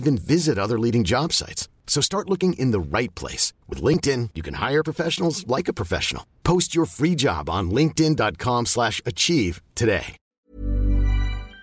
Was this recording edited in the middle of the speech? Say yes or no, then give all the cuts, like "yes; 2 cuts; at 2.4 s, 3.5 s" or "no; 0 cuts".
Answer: yes; 1 cut; at 10.2 s